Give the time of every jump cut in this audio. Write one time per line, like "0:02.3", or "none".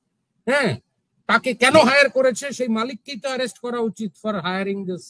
none

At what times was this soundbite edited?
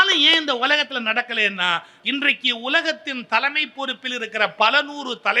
0:01.9

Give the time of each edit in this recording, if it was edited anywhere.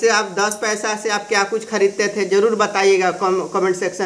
none

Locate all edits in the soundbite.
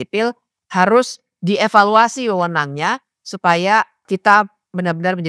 0:04.0

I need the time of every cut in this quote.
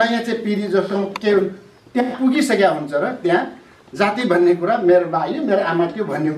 none

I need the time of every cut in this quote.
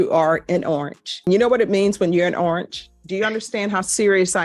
0:02.9

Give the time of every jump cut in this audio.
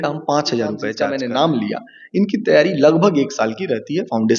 0:00.9

